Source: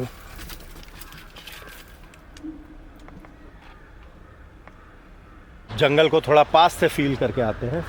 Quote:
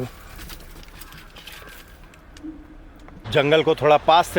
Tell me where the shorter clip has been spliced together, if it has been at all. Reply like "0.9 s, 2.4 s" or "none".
3.2 s